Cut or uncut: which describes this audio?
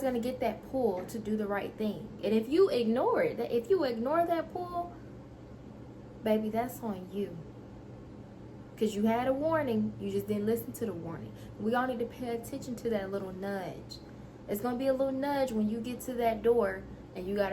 uncut